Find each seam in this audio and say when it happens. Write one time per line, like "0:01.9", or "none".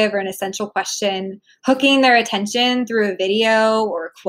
none